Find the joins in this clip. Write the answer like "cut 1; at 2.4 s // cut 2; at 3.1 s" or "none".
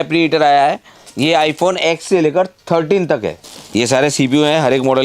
cut 1; at 3.6 s